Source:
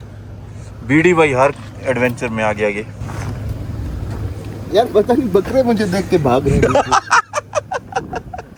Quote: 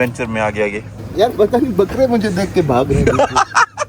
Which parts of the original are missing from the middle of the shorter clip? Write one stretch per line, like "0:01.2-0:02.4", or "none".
0:03.0-0:04.5